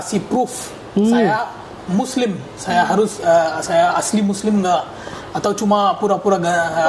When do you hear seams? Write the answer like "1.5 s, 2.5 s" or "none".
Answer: none

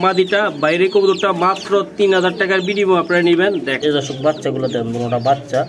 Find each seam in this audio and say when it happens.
3.7 s

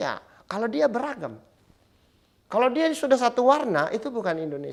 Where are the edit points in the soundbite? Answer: none

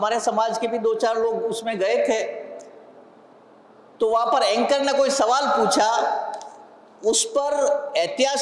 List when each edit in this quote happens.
none

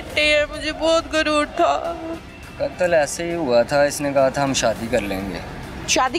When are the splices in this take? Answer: 2.1 s

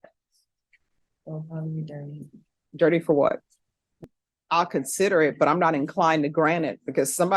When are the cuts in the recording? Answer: 4.2 s

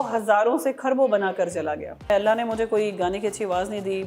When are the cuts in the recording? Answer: 2.1 s

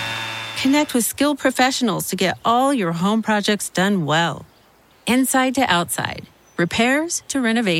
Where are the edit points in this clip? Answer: none

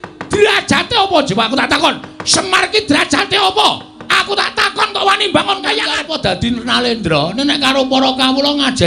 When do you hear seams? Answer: 6.0 s

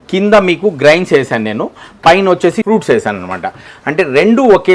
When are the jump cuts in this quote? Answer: 2.6 s

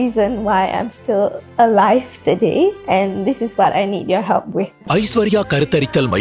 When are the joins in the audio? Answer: 4.8 s

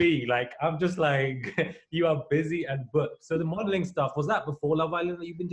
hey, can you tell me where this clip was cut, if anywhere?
none

